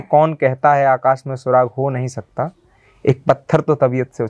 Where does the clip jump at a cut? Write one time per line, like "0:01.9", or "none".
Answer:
none